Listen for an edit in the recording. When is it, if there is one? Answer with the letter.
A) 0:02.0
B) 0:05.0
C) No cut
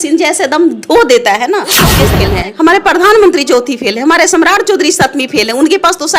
A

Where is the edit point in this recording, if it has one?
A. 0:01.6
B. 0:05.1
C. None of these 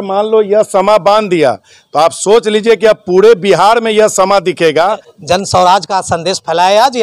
B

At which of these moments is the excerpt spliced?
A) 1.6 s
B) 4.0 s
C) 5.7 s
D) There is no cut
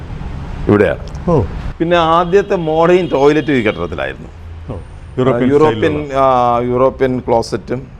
A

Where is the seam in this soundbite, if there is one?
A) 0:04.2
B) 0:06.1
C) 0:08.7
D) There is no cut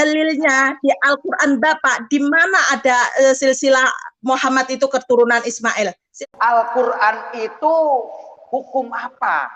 B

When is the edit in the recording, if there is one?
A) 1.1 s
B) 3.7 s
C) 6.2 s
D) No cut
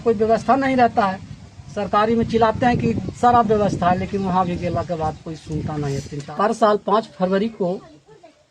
C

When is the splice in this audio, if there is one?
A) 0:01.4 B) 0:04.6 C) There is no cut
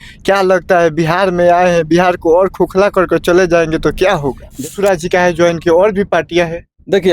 B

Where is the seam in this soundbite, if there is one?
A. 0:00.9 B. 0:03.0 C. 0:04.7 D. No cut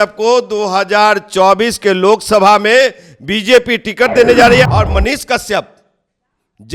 C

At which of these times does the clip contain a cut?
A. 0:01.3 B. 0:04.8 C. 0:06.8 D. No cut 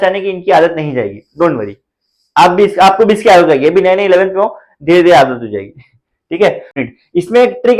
C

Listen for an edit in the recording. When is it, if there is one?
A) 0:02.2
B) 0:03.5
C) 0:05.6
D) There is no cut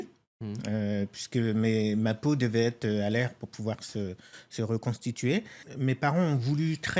C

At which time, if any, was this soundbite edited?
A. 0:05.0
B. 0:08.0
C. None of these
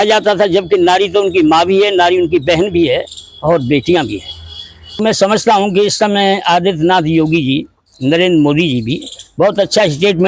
A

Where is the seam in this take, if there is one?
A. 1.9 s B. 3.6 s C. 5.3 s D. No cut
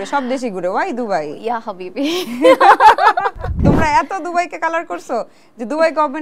B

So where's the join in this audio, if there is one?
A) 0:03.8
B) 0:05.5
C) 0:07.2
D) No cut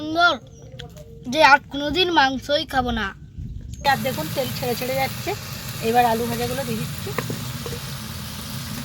A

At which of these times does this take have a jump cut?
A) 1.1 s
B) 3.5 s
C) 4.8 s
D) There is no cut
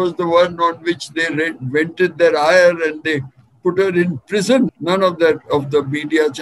C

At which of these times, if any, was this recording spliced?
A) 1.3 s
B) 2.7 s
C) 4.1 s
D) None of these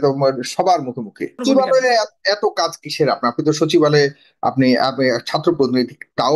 A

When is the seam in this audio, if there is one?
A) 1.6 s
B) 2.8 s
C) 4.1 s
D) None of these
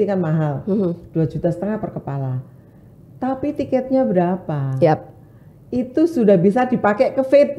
D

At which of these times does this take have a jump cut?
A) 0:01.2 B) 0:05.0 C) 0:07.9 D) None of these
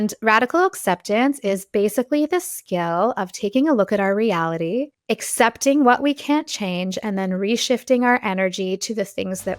B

